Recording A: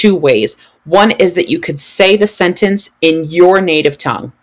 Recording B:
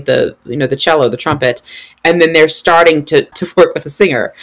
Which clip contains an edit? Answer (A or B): B